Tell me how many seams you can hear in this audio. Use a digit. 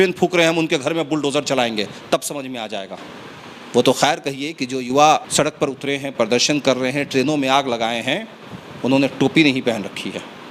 0